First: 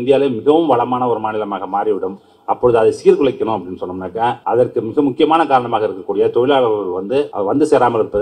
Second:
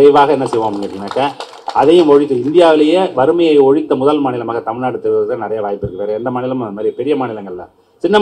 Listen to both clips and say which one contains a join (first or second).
first